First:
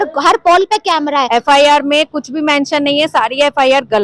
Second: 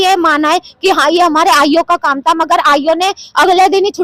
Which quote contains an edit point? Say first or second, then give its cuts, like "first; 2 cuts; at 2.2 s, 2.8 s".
first; 1 cut; at 1.3 s